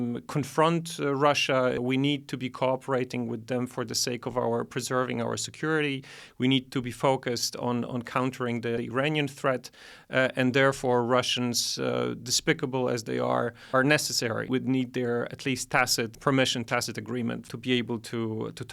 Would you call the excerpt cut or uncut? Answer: cut